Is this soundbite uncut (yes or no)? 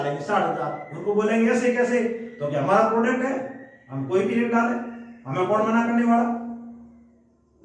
yes